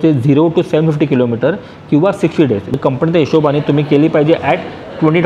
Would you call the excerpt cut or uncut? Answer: cut